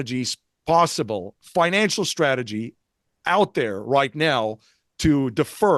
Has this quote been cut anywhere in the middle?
yes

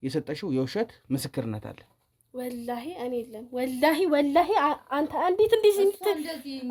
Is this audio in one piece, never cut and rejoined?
yes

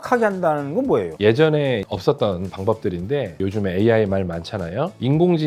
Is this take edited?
no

